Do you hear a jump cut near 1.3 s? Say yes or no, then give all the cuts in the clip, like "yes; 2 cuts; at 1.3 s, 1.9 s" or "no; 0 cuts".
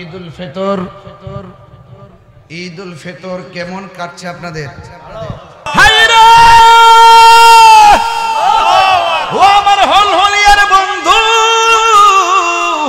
no; 1 cut; at 5.7 s